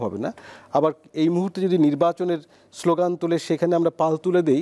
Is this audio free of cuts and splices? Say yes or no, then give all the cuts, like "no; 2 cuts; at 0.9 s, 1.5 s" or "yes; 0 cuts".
yes; 0 cuts